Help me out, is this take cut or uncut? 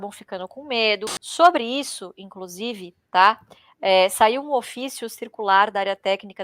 cut